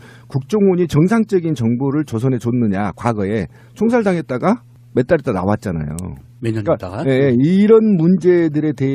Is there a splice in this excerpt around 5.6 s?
no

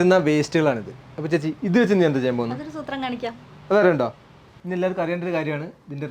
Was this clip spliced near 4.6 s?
yes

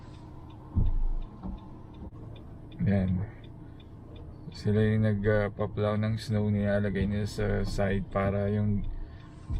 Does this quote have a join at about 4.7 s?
no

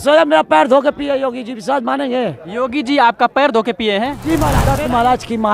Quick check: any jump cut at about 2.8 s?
no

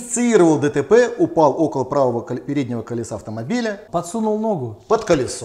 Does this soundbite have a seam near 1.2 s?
no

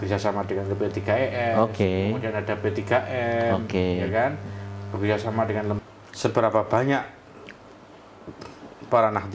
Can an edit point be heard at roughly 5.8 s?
yes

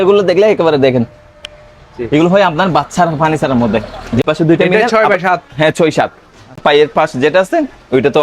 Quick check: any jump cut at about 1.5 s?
no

